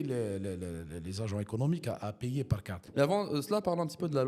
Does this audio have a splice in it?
yes; 1 cut; at 2.9 s

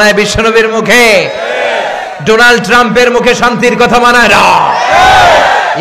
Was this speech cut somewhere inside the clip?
no; 0 cuts

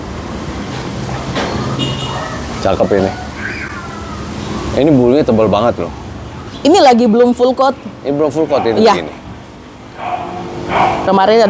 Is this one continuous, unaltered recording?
yes; 0 cuts

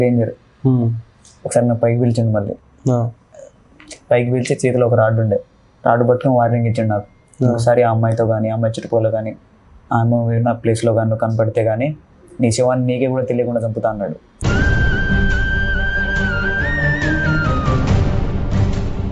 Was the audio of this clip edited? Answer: no; 0 cuts

